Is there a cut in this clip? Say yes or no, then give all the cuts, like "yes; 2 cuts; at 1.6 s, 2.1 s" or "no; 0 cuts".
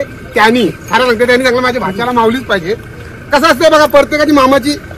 no; 0 cuts